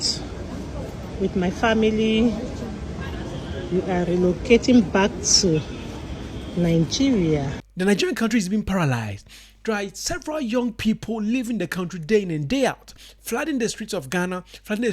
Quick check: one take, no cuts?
no; 1 cut; at 7.6 s

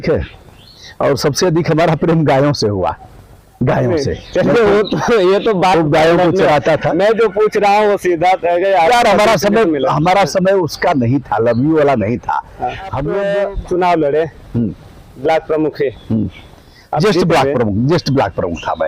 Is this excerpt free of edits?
no; 1 cut; at 13.0 s

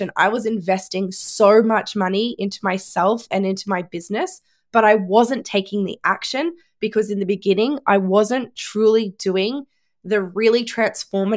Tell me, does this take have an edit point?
no; 0 cuts

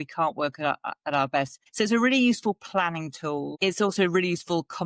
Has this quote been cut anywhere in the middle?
yes; 2 cuts; at 1.6 s, 3.5 s

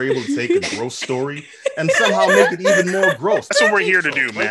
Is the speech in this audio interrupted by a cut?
yes; 1 cut; at 3.5 s

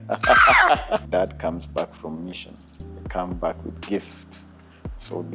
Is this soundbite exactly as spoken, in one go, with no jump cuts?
no; 1 cut; at 1.1 s

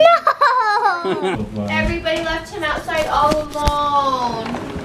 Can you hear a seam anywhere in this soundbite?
yes; 1 cut; at 1.4 s

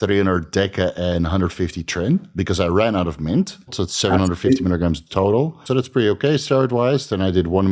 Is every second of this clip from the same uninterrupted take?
no; 2 cuts; at 3.8 s, 5.6 s

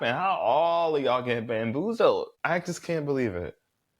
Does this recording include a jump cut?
yes; 1 cut; at 2.3 s

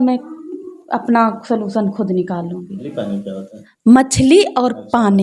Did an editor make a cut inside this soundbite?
yes; 1 cut; at 2.7 s

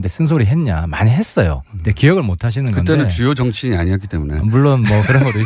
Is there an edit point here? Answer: yes; 1 cut; at 4.5 s

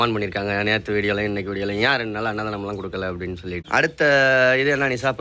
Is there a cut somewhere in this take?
yes; 1 cut; at 3.6 s

